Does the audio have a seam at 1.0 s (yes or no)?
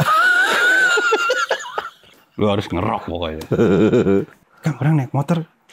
no